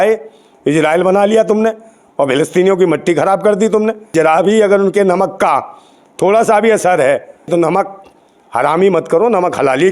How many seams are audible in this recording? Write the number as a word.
two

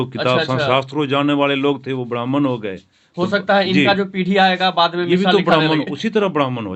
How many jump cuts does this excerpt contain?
zero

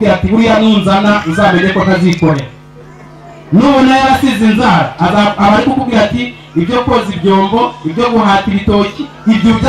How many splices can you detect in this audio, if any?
zero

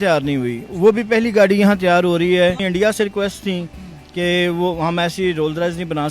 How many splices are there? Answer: one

